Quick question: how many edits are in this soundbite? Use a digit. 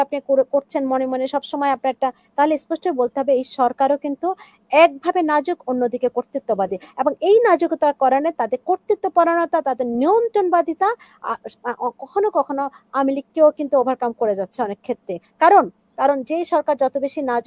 0